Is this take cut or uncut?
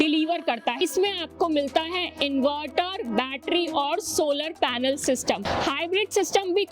cut